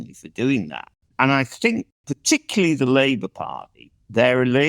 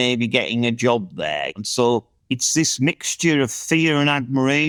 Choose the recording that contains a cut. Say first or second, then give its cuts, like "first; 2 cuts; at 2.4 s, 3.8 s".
first; 2 cuts; at 1.0 s, 1.9 s